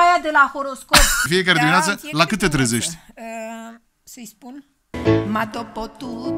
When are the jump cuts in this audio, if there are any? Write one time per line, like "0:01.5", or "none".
0:01.2
0:04.9